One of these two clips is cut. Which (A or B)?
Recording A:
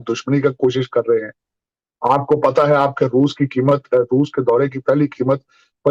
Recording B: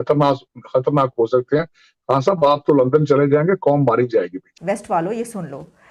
B